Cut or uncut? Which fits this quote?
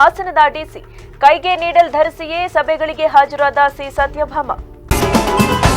cut